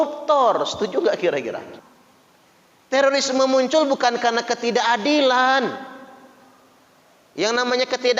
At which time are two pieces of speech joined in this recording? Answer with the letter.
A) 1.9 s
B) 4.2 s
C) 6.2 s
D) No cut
A